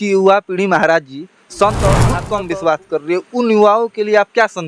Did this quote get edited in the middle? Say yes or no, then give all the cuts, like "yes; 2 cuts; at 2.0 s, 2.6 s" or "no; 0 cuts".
yes; 1 cut; at 2.2 s